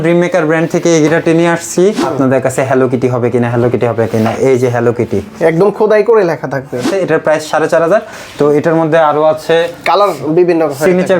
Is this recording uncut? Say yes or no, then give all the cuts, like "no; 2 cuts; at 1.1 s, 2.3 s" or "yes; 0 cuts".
no; 2 cuts; at 2.0 s, 6.9 s